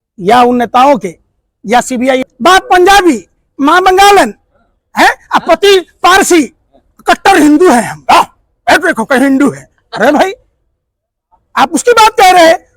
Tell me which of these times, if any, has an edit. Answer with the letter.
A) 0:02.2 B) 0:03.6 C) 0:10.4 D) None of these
A